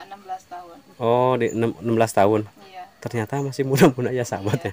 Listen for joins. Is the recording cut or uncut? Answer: uncut